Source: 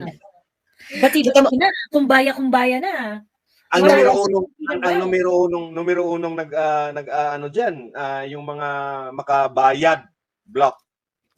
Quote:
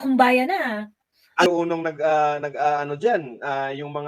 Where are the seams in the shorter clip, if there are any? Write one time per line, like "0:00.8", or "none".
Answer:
0:01.5